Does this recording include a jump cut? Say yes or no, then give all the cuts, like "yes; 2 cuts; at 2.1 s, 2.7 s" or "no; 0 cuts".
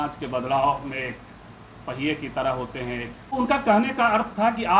yes; 1 cut; at 3.2 s